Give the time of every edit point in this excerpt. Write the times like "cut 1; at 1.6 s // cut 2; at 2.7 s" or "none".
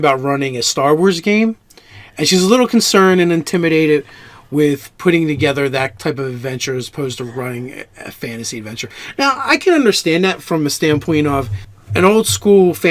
cut 1; at 6.4 s